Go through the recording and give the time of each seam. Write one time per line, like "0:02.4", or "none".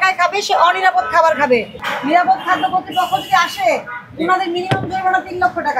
0:01.8